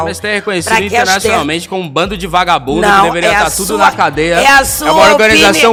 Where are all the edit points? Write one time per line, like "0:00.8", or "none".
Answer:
none

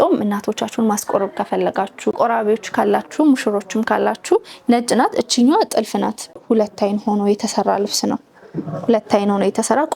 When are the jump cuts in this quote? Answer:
0:02.2
0:06.2

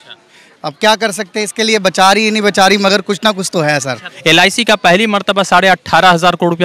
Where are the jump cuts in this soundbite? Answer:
0:04.1

